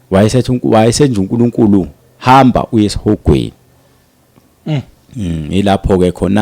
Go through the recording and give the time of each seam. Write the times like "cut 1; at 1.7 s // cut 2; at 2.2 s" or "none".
none